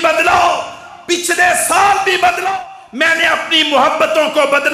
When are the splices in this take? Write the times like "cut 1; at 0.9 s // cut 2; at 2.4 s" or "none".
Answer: cut 1; at 2.5 s